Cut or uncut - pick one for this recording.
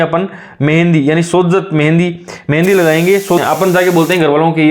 cut